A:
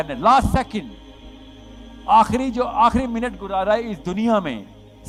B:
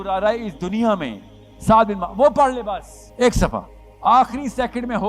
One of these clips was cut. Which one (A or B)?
B